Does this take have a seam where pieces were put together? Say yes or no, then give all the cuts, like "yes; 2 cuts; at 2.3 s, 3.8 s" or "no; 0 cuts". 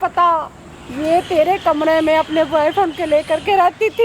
no; 0 cuts